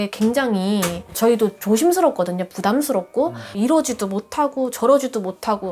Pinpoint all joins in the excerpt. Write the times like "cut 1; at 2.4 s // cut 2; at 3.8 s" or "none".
cut 1; at 3.5 s